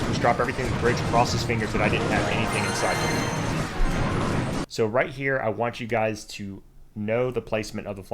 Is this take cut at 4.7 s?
yes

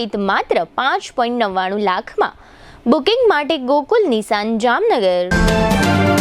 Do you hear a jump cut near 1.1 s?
no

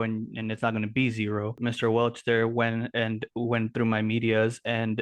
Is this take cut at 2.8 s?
no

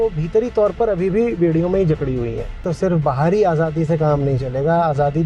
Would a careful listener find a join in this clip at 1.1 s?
no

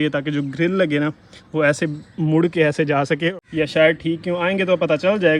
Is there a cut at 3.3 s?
yes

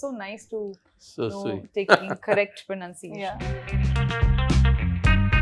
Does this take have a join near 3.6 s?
yes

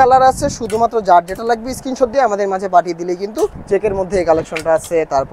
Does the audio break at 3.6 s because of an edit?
yes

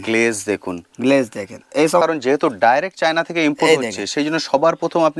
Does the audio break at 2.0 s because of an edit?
yes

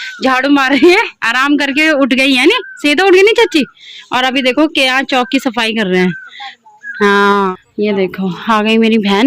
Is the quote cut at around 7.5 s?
yes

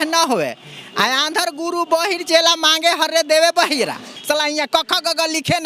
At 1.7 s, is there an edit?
no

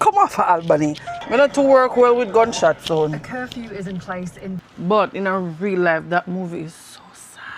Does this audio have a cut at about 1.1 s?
yes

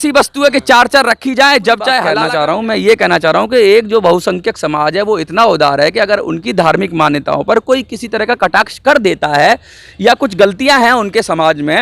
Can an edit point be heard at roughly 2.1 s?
yes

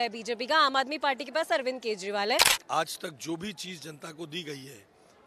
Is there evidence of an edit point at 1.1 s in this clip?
no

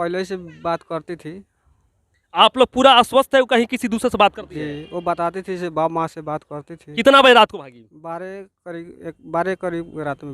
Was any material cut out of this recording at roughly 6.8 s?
yes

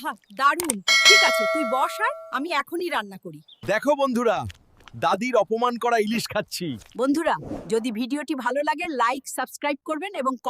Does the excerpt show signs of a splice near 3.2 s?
yes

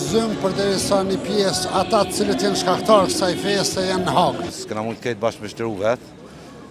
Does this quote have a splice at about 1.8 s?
no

